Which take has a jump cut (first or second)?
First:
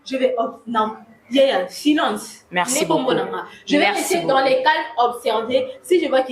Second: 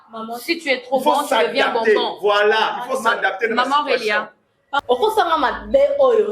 second